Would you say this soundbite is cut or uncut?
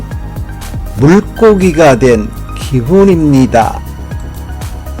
cut